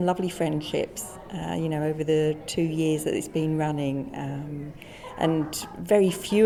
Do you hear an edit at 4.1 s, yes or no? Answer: no